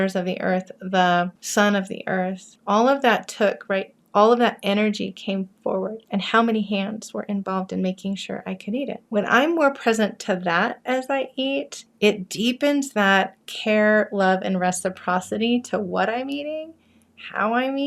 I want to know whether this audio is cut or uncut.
cut